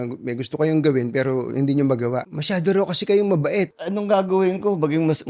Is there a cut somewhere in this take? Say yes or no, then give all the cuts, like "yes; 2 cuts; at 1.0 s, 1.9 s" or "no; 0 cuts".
yes; 2 cuts; at 2.3 s, 3.8 s